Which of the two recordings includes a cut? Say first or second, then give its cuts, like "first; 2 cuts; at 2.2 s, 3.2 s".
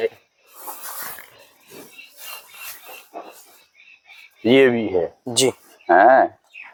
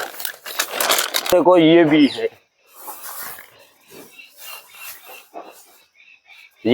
second; 1 cut; at 1.1 s